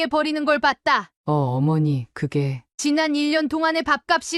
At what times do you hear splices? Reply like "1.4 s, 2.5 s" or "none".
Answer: 1.1 s